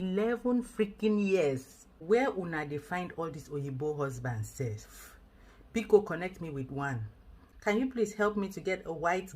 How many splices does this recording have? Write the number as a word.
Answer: two